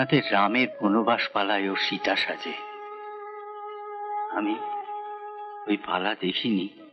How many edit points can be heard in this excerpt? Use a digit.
0